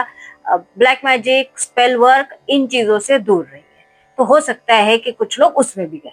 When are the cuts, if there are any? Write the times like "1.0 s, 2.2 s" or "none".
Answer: none